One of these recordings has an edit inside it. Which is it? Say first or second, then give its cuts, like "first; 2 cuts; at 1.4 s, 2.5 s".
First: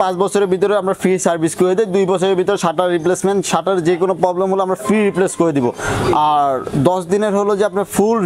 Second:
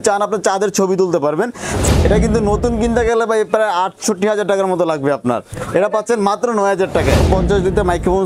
second; 2 cuts; at 1.8 s, 7.2 s